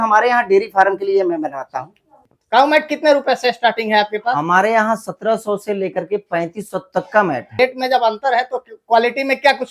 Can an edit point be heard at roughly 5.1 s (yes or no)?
no